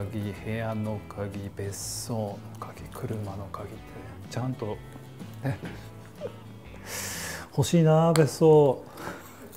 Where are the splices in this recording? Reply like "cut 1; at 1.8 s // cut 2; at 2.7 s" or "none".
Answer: none